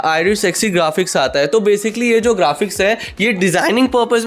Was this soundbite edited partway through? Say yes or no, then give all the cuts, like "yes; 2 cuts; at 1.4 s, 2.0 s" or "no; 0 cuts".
no; 0 cuts